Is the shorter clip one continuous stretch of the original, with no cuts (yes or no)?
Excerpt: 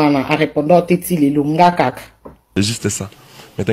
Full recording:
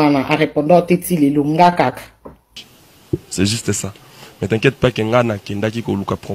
no